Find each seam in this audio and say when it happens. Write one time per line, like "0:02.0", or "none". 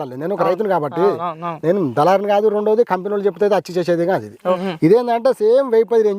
0:04.7